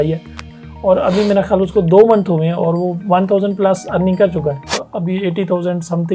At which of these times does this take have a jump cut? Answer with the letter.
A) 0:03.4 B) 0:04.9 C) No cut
B